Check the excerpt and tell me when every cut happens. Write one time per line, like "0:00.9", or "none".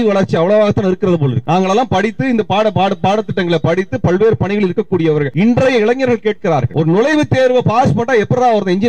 0:01.4
0:05.3
0:06.7

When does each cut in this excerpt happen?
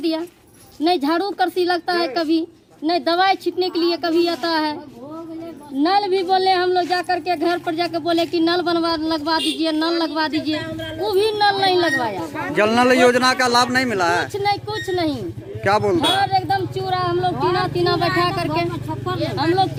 none

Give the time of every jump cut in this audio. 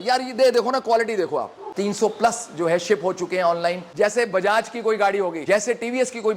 0:01.6
0:03.8
0:05.4

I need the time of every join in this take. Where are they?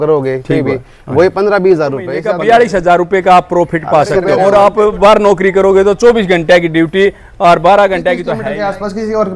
0:02.2
0:04.3
0:08.3

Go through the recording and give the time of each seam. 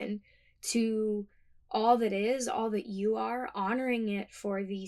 none

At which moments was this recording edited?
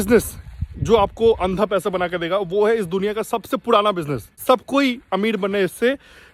0:04.4

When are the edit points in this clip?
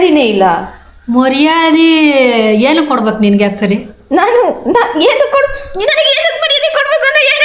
none

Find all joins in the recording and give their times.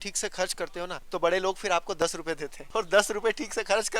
0:01.0
0:02.5

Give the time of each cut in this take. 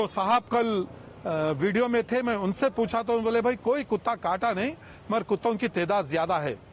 none

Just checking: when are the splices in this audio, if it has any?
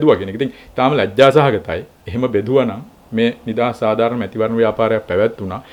none

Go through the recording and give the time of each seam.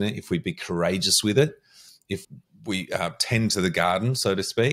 0:02.2

